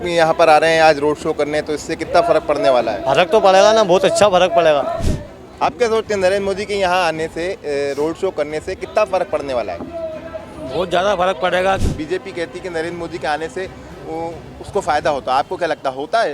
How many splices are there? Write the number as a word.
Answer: two